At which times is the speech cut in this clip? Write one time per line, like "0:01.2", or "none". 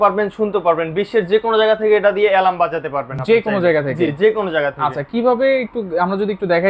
none